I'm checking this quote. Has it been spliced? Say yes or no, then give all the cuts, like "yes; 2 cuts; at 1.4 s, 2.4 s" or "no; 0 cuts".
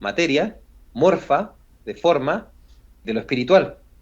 yes; 1 cut; at 3.0 s